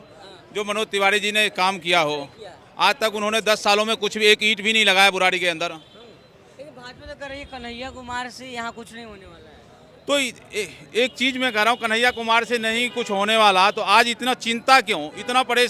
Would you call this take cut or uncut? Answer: uncut